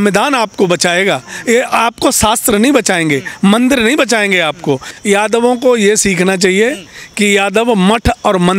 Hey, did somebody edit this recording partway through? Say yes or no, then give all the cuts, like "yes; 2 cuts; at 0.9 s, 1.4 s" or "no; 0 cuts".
yes; 1 cut; at 4.9 s